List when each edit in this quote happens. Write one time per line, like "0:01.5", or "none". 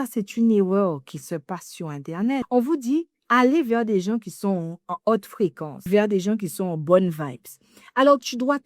0:02.5
0:05.7